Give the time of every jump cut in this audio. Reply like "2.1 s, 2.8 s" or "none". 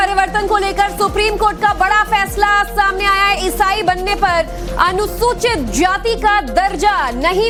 none